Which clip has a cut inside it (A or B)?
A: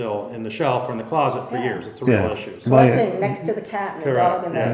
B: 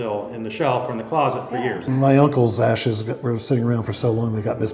B